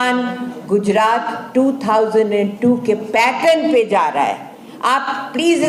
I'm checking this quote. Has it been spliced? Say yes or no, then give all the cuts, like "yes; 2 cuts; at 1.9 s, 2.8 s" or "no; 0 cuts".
no; 0 cuts